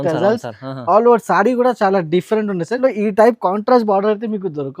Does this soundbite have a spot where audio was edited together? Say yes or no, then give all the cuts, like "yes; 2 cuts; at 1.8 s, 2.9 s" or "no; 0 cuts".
yes; 1 cut; at 2.8 s